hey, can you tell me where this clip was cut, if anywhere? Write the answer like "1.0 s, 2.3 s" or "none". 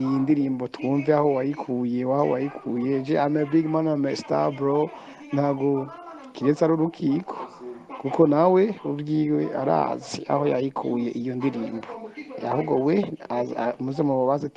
none